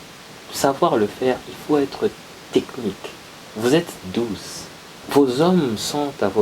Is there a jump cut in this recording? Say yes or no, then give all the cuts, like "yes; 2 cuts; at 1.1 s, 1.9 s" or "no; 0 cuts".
yes; 1 cut; at 5.1 s